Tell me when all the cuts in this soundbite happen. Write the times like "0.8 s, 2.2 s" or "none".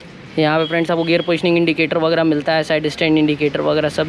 none